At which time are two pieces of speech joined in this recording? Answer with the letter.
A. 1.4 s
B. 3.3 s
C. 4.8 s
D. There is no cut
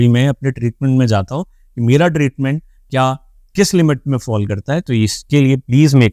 D